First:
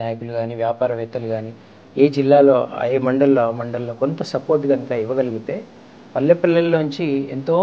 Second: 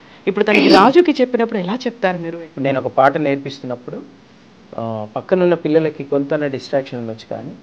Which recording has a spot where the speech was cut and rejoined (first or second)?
second